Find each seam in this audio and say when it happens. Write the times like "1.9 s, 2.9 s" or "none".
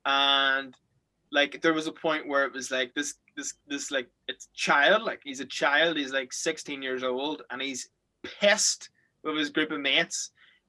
none